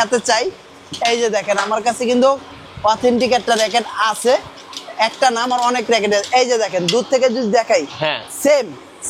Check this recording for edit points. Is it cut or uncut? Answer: uncut